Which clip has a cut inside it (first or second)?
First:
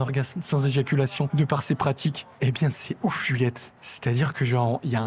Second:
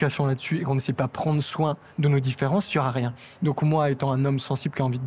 first